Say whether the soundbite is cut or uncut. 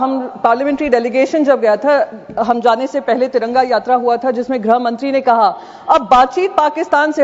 uncut